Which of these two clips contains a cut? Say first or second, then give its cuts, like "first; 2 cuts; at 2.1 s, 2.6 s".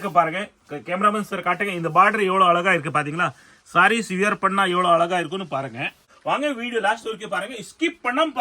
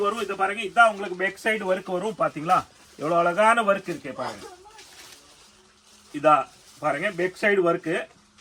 first; 1 cut; at 6.1 s